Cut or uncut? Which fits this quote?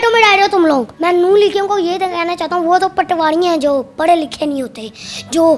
cut